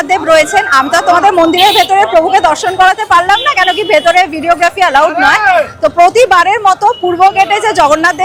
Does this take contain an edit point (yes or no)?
no